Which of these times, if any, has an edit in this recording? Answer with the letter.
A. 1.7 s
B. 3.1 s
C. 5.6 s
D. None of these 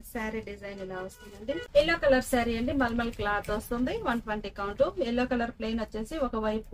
A